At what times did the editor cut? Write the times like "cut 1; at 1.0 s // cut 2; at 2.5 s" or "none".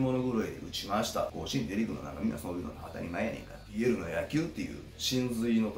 cut 1; at 1.3 s // cut 2; at 3.7 s